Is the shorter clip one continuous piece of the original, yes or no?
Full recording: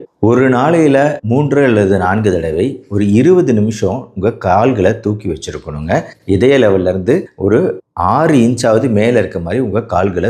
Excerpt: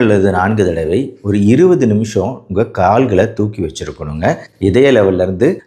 yes